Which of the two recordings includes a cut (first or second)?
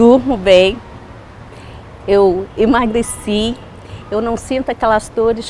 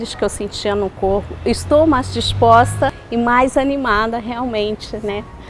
second